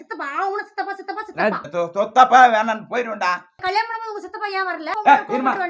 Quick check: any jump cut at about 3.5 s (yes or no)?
yes